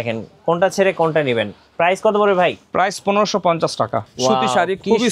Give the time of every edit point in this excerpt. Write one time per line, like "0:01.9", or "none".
0:04.0